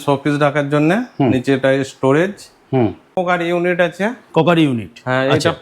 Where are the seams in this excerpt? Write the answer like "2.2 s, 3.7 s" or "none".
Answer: 3.2 s